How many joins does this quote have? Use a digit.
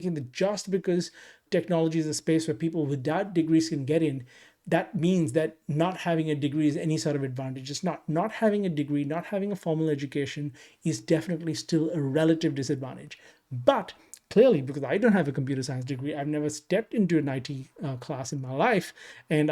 1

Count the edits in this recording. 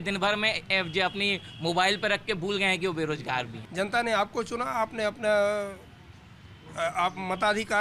1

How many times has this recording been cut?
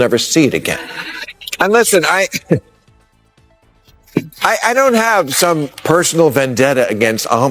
1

